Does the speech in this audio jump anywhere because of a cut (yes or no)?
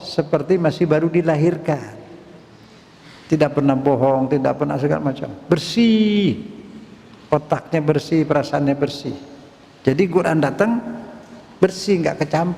no